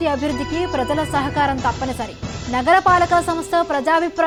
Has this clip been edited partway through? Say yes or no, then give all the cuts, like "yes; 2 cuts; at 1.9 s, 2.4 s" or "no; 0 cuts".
no; 0 cuts